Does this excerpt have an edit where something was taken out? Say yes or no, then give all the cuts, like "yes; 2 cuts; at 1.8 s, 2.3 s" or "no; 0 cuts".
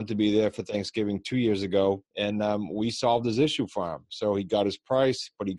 yes; 1 cut; at 2.1 s